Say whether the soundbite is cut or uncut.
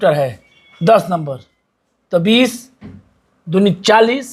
uncut